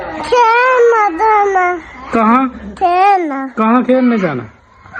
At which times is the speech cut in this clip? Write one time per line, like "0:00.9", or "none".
none